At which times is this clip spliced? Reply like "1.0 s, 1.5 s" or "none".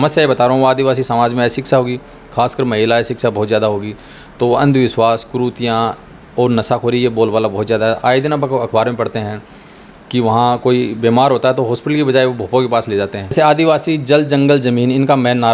13.3 s